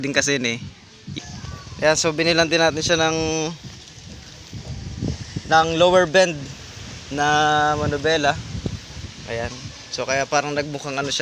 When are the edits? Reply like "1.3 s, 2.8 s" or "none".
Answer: 1.0 s